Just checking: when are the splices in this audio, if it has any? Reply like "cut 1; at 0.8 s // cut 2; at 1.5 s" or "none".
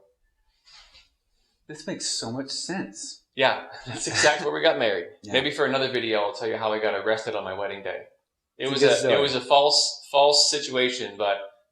cut 1; at 4.4 s